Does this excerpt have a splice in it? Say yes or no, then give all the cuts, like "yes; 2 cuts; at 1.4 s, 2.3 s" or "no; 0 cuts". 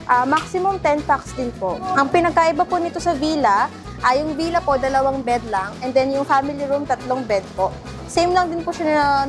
no; 0 cuts